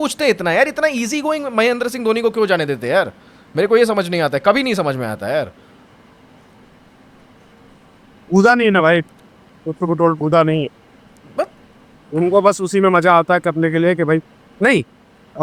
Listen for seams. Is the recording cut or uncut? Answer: uncut